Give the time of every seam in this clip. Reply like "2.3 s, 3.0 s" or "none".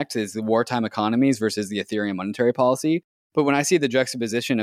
3.2 s